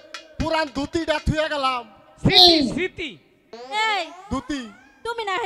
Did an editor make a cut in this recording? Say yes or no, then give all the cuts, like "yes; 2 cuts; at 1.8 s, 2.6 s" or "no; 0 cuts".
no; 0 cuts